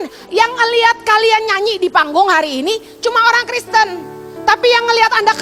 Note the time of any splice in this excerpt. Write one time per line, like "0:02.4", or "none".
none